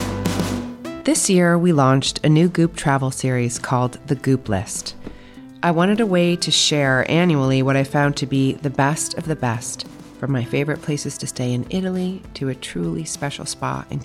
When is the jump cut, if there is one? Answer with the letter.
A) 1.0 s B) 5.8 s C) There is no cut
A